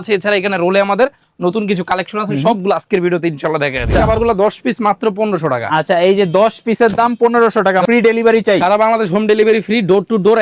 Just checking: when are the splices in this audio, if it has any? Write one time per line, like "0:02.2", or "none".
0:04.0
0:07.8